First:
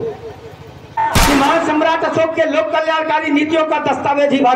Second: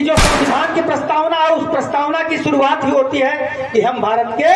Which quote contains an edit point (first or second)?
first